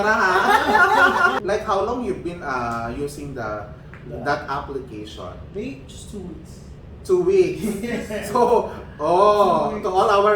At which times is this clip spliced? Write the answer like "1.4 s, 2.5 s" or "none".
1.4 s